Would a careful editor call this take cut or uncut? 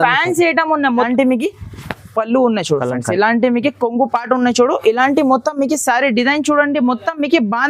cut